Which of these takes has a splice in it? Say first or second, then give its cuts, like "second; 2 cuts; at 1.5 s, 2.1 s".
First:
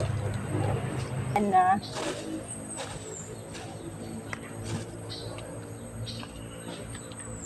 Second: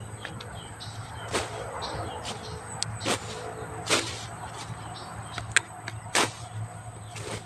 first; 1 cut; at 1.4 s